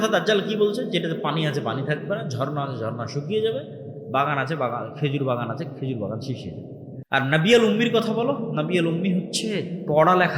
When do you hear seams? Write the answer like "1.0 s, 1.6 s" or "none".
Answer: 6.9 s

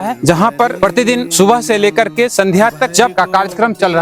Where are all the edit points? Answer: none

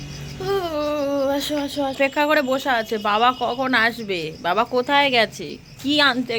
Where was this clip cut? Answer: none

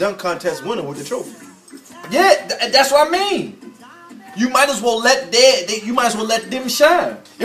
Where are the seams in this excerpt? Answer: 6.2 s

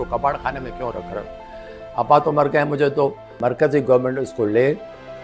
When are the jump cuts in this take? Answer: 3.3 s

